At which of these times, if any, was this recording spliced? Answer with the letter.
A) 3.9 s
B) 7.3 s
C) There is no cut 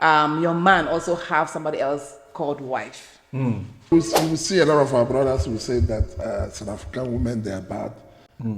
A